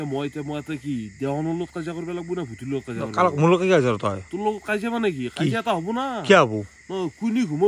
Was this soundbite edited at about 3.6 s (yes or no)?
no